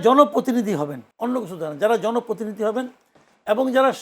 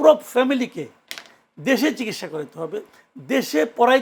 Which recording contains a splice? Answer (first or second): first